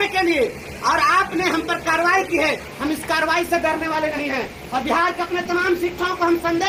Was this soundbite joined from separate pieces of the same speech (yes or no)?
no